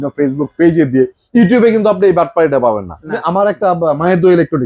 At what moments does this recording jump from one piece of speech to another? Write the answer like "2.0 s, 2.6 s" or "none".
none